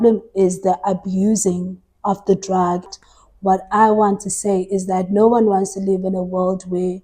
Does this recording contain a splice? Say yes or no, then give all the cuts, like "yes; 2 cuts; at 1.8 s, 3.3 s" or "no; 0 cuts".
yes; 1 cut; at 2.9 s